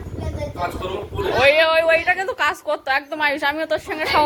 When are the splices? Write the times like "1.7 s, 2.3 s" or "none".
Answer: none